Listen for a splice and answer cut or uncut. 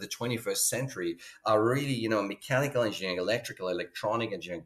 uncut